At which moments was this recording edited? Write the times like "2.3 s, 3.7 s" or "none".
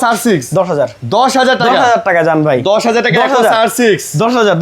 none